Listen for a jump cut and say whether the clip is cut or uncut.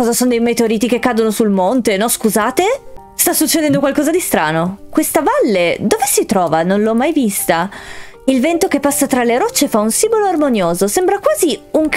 uncut